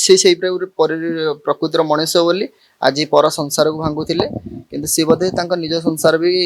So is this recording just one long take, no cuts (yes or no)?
yes